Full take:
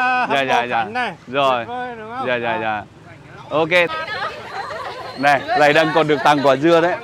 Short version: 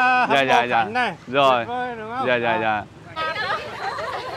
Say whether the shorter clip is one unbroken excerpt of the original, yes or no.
no